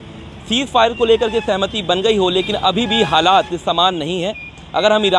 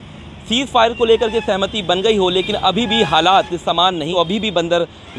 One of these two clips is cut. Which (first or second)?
second